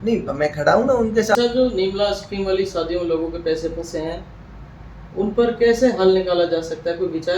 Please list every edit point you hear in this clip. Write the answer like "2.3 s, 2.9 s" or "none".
1.3 s